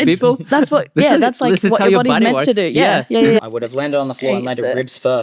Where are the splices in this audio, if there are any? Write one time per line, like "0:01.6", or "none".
0:03.5

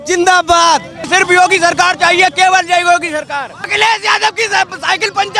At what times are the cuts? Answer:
0:01.1
0:03.7

